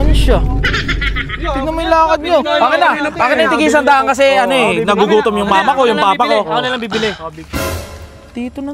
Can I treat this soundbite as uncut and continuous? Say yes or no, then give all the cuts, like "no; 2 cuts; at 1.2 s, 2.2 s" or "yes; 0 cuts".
yes; 0 cuts